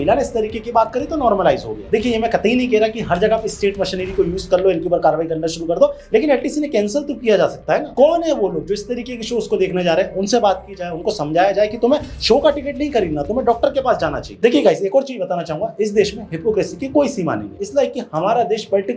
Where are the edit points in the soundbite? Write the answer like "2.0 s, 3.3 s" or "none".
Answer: none

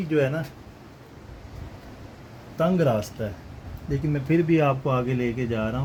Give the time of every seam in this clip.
none

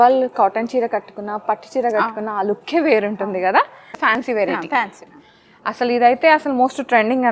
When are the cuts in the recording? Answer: 4.1 s

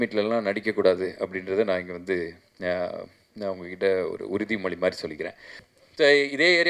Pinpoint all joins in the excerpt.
5.5 s

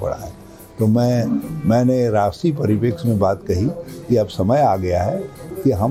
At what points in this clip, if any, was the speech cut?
none

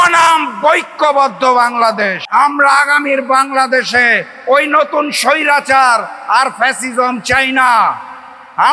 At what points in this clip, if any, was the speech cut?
2.2 s

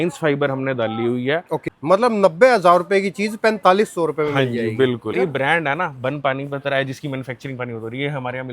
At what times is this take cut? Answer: 1.6 s, 5.2 s

